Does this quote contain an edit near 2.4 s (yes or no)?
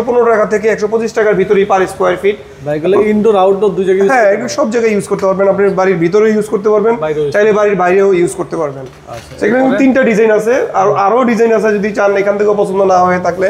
no